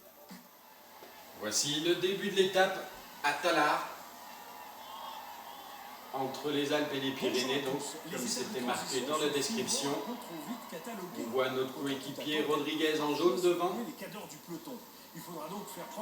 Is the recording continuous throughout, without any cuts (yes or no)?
no